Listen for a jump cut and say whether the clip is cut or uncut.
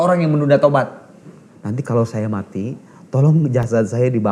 cut